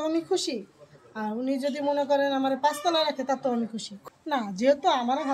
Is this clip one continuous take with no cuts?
no; 1 cut; at 3.9 s

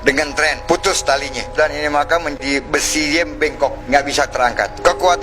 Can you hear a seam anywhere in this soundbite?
yes; 1 cut; at 2.4 s

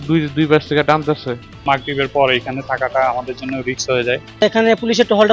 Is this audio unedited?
no; 1 cut; at 1.6 s

